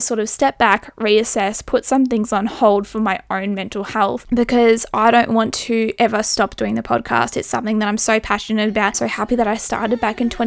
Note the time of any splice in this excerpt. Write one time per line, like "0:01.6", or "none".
0:04.2
0:09.1

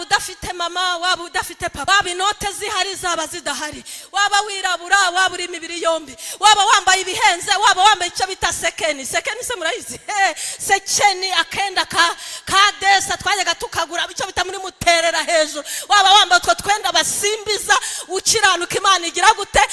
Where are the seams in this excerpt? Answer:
0:01.8

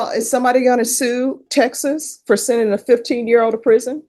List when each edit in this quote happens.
none

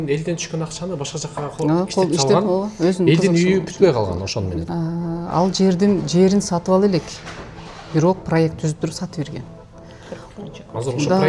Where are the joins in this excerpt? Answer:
0:04.6

